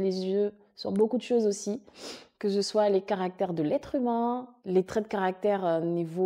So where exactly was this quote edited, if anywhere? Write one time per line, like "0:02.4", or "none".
0:04.5